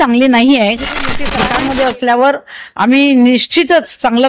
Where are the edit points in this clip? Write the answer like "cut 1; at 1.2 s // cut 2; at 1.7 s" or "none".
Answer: cut 1; at 1.3 s